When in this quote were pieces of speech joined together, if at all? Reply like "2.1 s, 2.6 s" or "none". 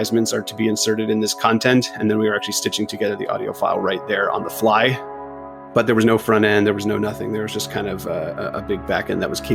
5.4 s